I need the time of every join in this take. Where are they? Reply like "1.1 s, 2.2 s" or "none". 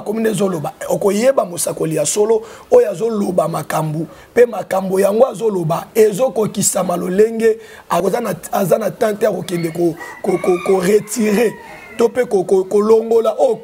8.0 s